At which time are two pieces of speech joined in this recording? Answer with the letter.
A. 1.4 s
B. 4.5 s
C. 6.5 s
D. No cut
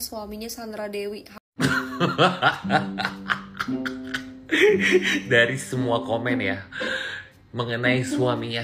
A